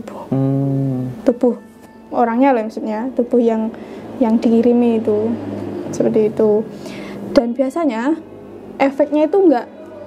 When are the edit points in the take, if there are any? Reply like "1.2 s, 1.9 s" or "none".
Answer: none